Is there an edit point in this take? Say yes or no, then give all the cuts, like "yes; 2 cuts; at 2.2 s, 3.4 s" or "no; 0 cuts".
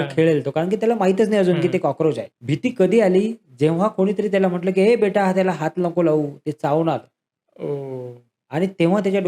yes; 1 cut; at 2.3 s